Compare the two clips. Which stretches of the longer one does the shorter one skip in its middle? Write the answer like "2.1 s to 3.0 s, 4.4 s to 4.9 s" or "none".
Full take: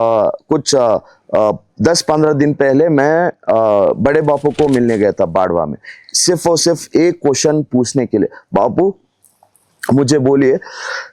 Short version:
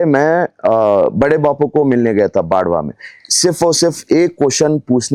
none